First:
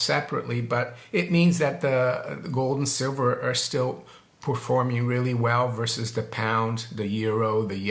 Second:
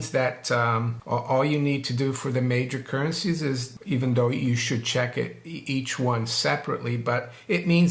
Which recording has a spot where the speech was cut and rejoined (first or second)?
second